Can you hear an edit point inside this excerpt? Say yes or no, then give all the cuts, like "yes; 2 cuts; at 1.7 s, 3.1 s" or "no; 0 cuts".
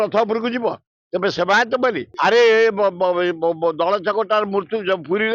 yes; 1 cut; at 2.1 s